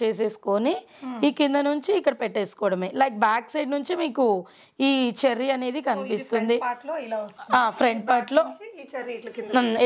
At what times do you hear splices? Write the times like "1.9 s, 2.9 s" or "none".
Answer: none